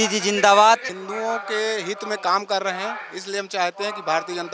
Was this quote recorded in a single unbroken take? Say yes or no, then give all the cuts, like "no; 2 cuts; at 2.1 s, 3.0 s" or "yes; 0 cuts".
no; 1 cut; at 1.0 s